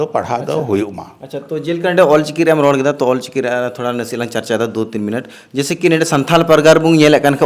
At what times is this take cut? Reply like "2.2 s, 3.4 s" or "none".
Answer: none